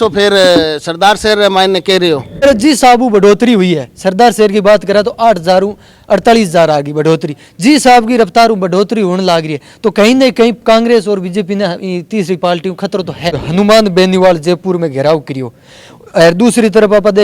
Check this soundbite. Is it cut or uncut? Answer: cut